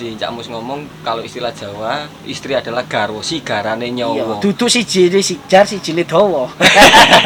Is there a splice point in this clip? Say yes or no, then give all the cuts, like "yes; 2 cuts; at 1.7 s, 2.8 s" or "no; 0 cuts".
no; 0 cuts